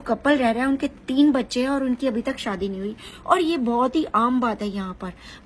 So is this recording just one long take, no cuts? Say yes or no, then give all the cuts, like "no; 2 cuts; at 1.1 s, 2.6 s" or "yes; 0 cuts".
yes; 0 cuts